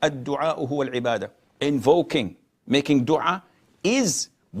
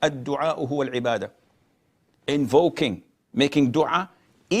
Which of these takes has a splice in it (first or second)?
first